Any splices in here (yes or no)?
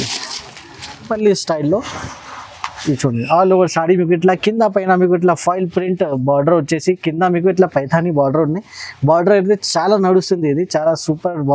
yes